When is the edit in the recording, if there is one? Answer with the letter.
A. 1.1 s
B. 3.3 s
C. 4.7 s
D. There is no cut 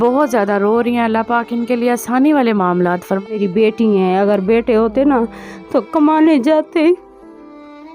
B